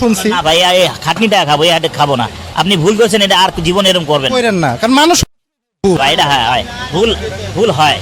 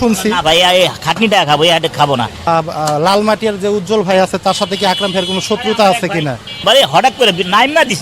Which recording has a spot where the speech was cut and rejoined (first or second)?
second